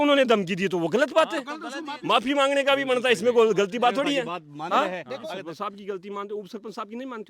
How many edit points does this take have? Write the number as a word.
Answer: two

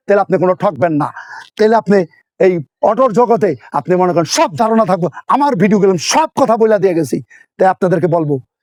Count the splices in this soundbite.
zero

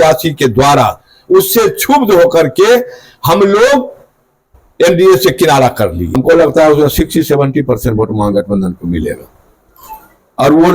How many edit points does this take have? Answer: one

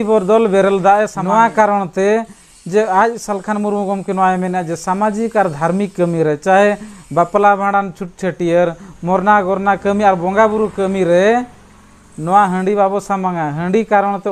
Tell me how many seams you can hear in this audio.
one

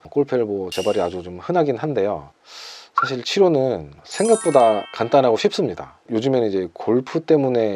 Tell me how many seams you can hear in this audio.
zero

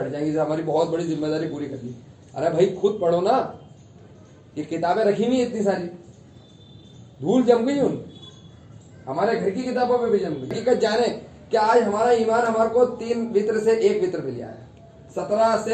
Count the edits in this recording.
one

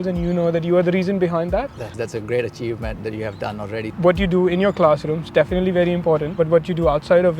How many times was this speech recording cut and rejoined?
three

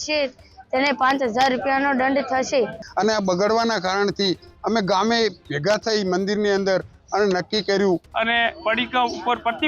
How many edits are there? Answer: two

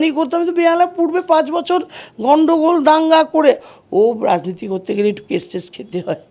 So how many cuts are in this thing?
one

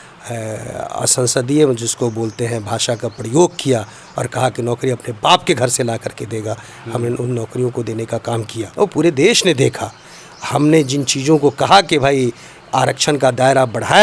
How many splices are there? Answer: one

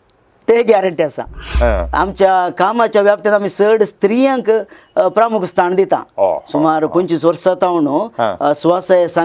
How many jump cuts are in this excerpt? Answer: one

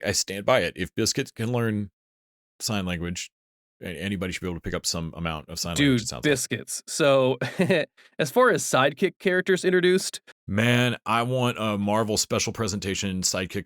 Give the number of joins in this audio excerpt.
one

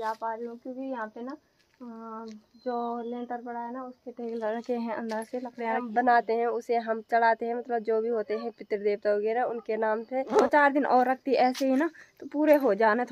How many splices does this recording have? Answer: two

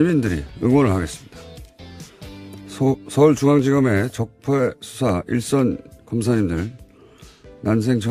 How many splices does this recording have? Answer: one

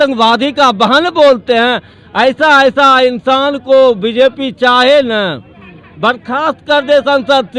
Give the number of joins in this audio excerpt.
zero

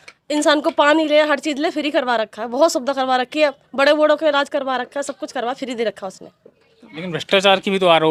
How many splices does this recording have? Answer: zero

